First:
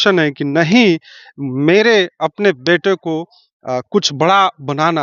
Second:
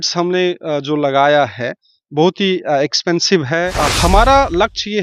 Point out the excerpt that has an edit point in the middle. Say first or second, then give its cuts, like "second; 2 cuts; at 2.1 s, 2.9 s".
second; 1 cut; at 3.8 s